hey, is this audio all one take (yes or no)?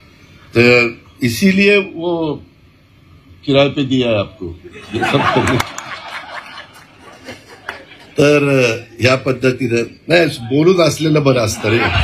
yes